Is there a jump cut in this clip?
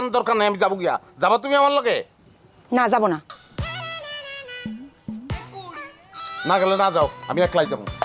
no; 0 cuts

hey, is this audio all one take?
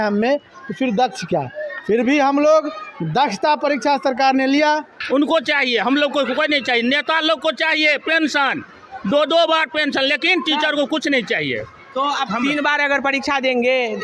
no; 1 cut; at 4.9 s

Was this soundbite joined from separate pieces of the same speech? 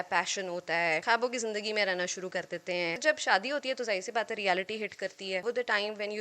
yes; 3 cuts; at 1.0 s, 3.0 s, 5.4 s

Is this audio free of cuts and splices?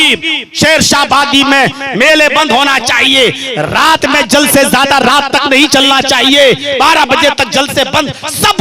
yes; 0 cuts

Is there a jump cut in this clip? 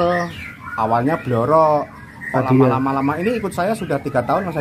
no; 0 cuts

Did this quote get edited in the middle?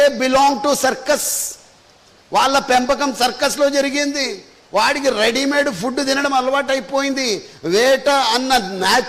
no; 0 cuts

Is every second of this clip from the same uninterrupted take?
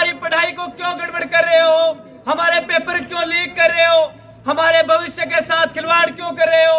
yes; 0 cuts

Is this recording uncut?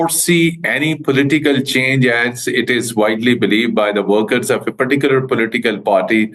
yes; 0 cuts

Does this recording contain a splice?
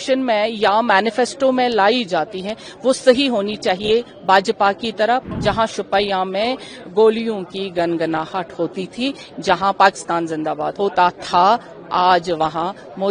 yes; 2 cuts; at 5.2 s, 10.7 s

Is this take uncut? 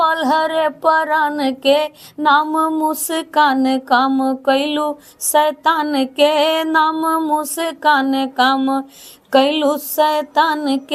yes; 0 cuts

